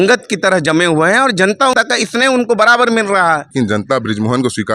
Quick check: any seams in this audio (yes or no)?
yes